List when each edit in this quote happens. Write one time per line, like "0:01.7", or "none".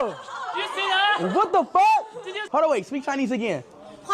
0:02.4